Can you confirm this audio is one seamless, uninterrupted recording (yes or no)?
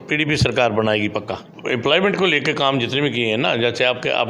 no